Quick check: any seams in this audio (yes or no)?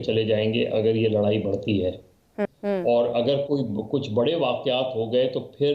yes